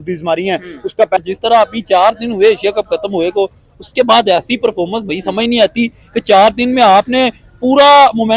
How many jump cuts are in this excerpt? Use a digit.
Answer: 1